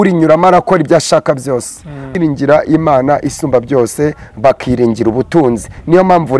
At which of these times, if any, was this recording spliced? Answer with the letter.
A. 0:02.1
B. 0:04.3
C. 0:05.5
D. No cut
A